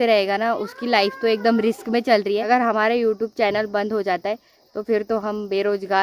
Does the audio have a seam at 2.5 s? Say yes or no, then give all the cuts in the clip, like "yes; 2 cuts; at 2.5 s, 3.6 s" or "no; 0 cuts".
yes; 1 cut; at 2.5 s